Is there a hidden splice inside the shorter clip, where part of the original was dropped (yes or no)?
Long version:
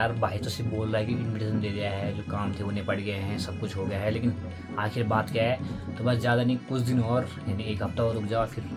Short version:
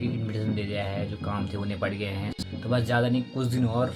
yes